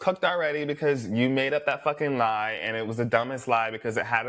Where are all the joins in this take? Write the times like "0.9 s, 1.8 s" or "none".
none